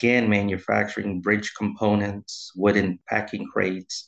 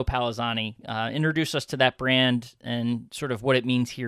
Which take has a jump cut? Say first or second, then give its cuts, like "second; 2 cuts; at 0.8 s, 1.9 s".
first; 1 cut; at 3.0 s